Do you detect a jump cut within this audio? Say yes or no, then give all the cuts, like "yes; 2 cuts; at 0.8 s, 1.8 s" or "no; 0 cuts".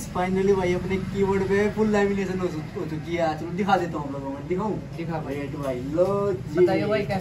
no; 0 cuts